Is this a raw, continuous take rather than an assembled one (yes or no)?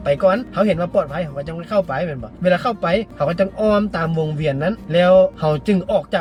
yes